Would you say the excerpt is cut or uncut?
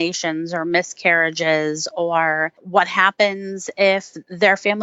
cut